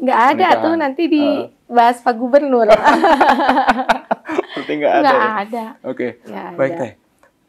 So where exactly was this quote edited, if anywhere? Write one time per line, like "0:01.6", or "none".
none

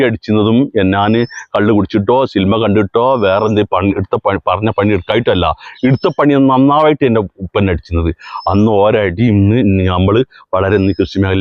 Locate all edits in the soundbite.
none

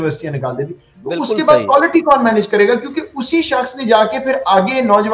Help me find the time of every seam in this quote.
none

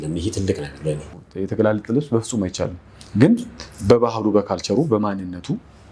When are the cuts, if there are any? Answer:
0:01.1

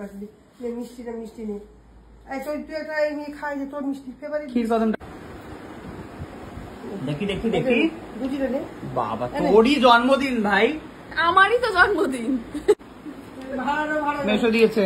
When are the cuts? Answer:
0:05.0
0:12.8

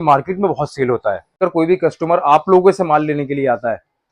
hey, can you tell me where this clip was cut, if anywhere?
0:01.4

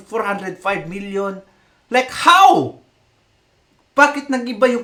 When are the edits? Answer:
none

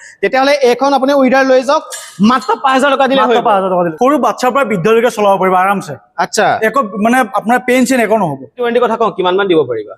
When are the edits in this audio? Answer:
0:03.9
0:08.6

